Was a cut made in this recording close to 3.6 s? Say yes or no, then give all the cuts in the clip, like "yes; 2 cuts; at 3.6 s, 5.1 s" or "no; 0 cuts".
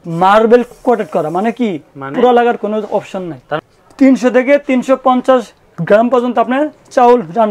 yes; 1 cut; at 3.6 s